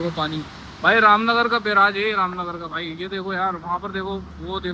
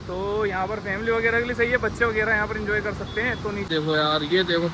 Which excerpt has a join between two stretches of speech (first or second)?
second